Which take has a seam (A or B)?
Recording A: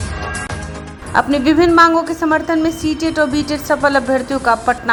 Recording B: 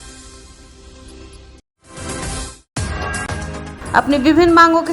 B